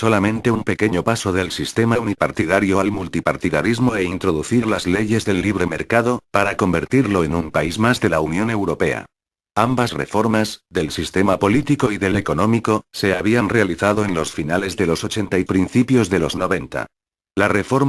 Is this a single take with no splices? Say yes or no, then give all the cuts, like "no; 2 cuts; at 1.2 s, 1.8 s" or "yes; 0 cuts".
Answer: no; 1 cut; at 7.1 s